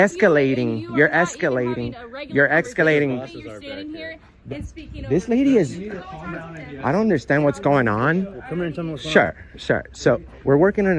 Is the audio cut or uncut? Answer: uncut